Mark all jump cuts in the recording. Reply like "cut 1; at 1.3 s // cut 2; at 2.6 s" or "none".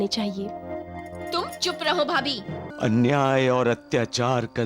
cut 1; at 2.7 s